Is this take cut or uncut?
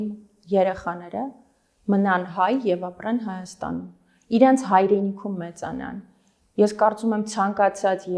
uncut